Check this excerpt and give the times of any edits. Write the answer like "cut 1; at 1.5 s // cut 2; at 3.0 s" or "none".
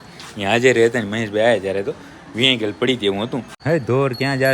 cut 1; at 3.5 s

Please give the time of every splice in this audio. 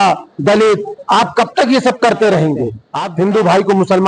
cut 1; at 3.0 s

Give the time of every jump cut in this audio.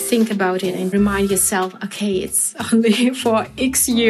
cut 1; at 0.9 s

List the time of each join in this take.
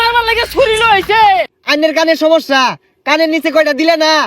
cut 1; at 1.5 s

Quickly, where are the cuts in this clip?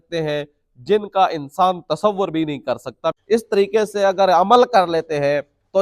cut 1; at 3.1 s

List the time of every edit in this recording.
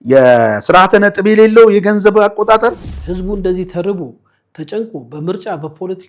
cut 1; at 2.9 s

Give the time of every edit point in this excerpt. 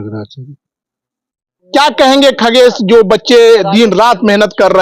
cut 1; at 1.6 s

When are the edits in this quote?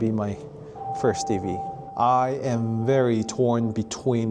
cut 1; at 1.8 s

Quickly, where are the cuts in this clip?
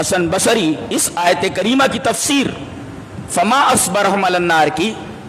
none

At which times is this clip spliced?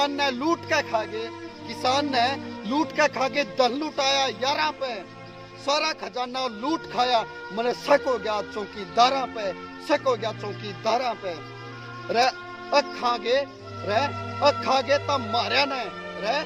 none

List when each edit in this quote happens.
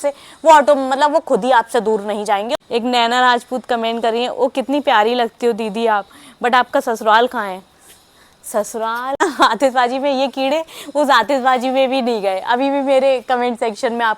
cut 1; at 2.6 s // cut 2; at 9.2 s

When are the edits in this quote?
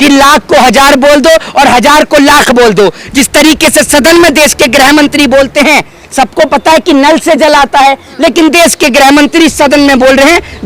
none

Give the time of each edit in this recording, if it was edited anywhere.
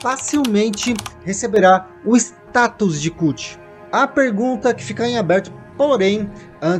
none

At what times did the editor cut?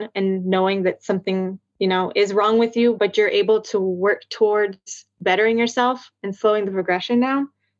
cut 1; at 3.0 s

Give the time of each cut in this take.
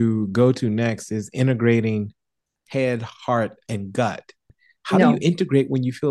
cut 1; at 4.5 s

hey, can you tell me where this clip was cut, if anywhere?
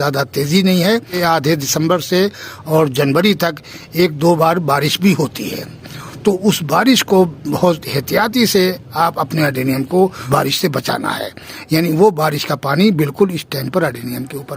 cut 1; at 1.2 s // cut 2; at 10.2 s

